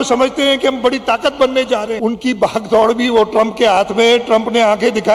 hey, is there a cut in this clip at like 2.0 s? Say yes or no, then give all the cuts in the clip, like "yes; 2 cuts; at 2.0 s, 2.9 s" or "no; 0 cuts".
yes; 1 cut; at 2.0 s